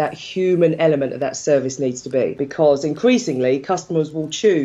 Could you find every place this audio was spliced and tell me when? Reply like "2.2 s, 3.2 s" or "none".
2.4 s